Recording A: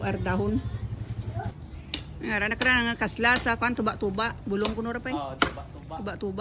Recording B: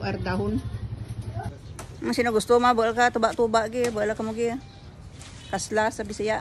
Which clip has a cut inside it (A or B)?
A